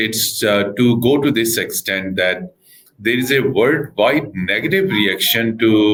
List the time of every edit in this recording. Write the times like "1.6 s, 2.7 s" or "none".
none